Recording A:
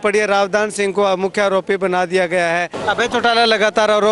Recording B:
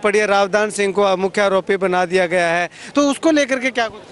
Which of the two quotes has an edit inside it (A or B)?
A